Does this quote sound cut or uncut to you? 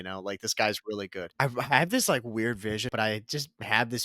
cut